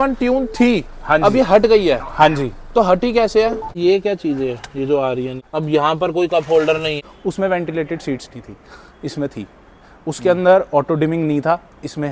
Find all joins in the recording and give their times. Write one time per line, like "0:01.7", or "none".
0:03.8
0:05.4
0:07.0